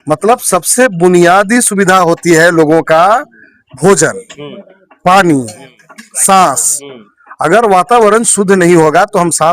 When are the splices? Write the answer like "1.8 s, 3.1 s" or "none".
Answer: none